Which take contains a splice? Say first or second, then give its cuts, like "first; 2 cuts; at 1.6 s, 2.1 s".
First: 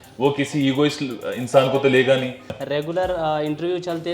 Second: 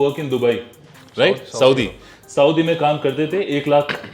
first; 1 cut; at 2.5 s